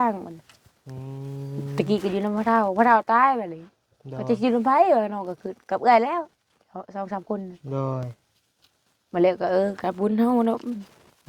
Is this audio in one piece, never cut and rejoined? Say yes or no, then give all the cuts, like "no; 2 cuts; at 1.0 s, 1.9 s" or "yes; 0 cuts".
yes; 0 cuts